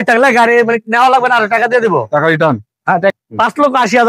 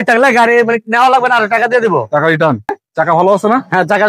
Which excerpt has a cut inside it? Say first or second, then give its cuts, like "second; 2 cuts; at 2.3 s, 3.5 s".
first; 1 cut; at 2.8 s